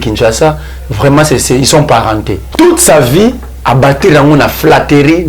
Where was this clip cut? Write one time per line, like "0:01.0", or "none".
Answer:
0:02.4